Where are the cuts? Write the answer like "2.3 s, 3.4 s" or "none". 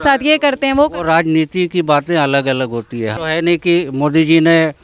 3.1 s